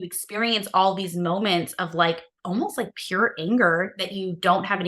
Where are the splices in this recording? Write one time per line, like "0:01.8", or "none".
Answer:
none